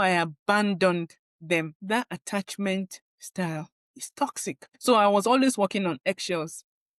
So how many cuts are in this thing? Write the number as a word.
two